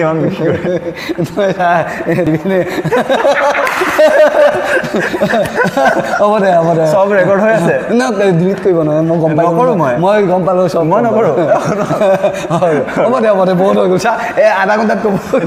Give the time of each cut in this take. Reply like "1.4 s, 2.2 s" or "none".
none